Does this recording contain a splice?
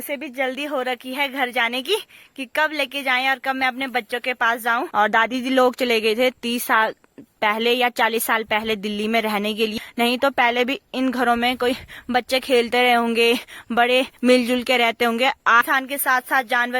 yes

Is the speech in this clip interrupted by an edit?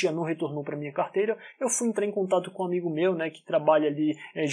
no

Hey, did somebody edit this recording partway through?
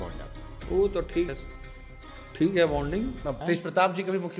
yes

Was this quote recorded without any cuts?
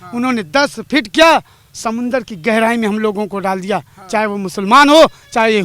yes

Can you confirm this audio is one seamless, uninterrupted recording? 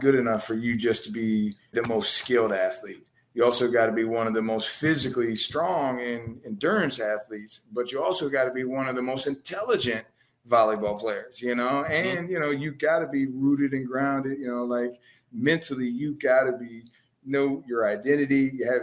yes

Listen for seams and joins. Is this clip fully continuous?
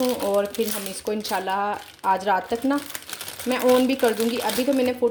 yes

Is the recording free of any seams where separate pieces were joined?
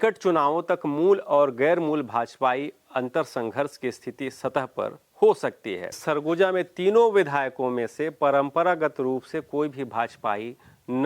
no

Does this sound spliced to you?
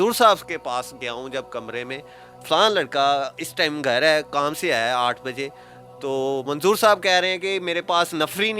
yes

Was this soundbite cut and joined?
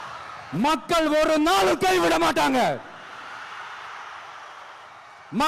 no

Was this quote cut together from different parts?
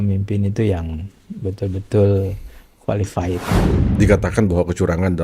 yes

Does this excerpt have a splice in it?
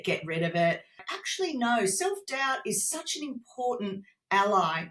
yes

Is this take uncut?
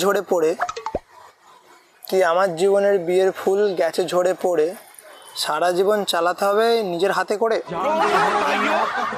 yes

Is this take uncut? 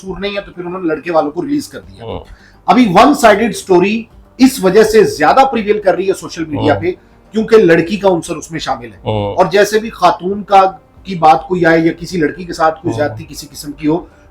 yes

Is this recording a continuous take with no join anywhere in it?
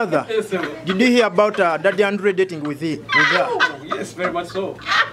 yes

